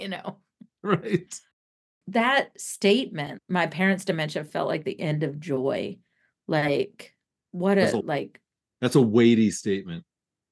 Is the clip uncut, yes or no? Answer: no